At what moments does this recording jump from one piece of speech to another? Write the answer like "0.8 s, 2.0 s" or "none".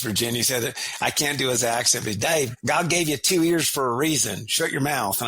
2.6 s